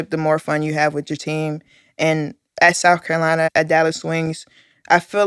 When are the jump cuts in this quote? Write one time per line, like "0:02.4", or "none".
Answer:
0:03.5